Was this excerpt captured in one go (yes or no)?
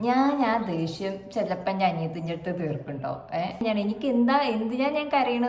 no